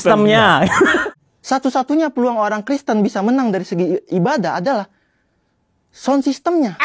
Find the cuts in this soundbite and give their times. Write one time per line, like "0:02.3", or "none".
0:01.1